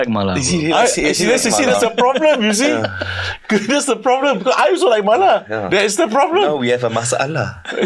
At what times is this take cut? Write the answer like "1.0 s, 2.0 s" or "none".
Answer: none